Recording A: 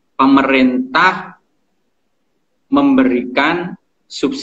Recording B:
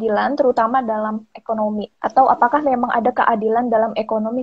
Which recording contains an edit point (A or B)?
B